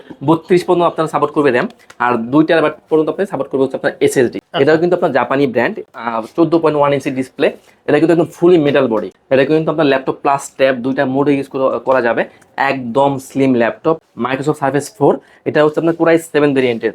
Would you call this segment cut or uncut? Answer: cut